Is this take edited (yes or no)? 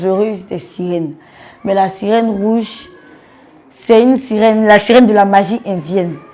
no